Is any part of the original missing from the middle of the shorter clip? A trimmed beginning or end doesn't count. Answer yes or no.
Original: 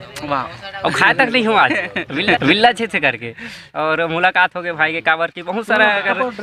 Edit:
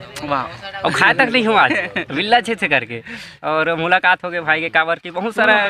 yes